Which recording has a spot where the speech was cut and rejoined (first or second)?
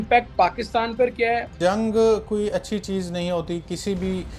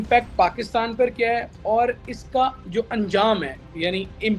first